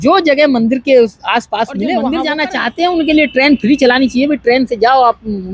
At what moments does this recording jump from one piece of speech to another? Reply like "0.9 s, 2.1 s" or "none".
2.1 s